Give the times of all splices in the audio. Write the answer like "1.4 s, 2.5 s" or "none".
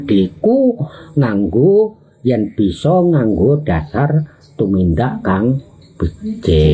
none

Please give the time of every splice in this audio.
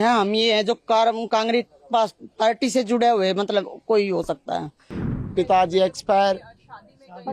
5.1 s

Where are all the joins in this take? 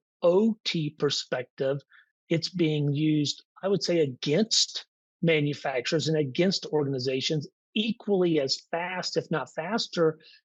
none

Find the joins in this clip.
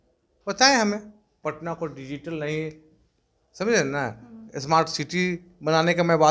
1.4 s

